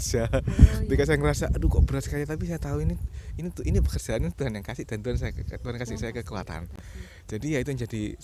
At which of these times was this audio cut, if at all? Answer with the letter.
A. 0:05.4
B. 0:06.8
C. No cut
C